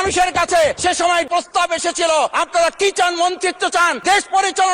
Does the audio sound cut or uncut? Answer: cut